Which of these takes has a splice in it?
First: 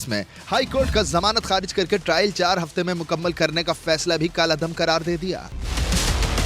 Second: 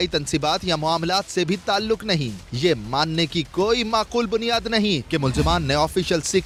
first; 1 cut; at 5.5 s

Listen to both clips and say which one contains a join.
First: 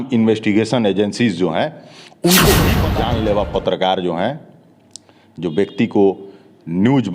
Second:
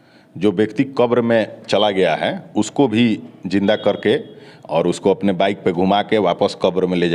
first; 1 cut; at 2.9 s

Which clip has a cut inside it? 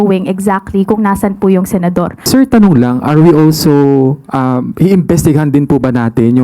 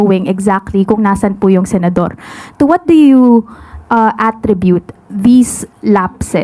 first; 1 cut; at 2.2 s

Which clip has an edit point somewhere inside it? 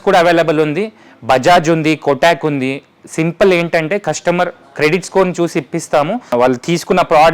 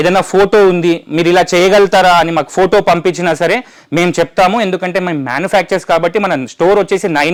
first; 1 cut; at 6.2 s

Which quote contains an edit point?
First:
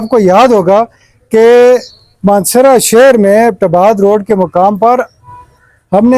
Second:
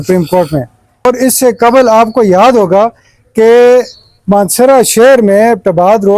second; 1 cut; at 1.1 s

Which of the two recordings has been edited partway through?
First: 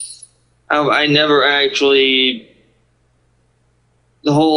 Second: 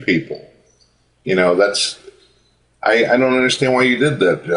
second; 1 cut; at 2.0 s

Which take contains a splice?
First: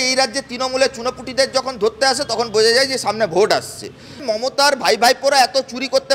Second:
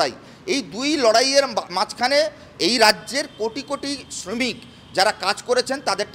first; 1 cut; at 4.2 s

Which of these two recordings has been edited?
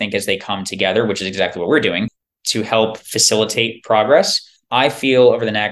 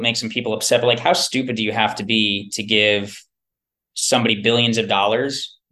first; 1 cut; at 2.2 s

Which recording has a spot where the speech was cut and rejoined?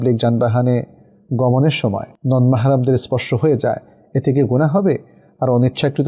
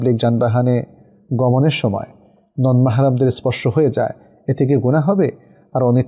first; 1 cut; at 2.1 s

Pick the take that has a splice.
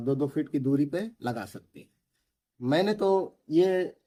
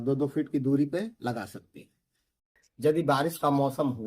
second; 1 cut; at 2.5 s

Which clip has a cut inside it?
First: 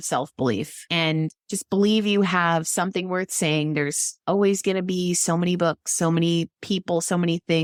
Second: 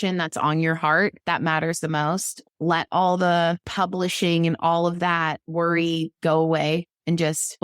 second; 2 cuts; at 2.4 s, 3.7 s

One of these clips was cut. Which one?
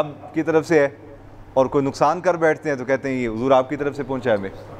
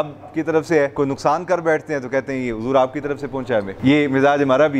second; 2 cuts; at 0.9 s, 3.7 s

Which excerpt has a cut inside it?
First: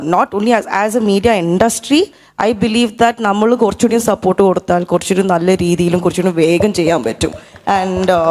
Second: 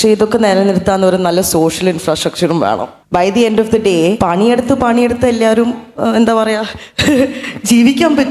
second; 2 cuts; at 2.9 s, 4.2 s

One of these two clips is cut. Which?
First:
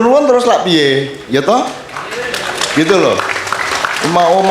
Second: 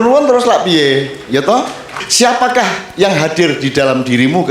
second; 1 cut; at 2.1 s

